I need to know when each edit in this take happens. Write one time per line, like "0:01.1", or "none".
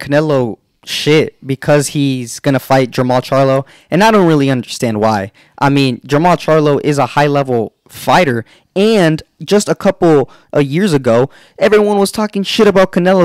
none